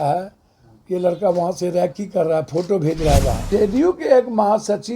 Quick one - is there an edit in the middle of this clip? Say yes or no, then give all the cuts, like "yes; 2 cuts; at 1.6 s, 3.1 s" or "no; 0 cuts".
yes; 1 cut; at 3.4 s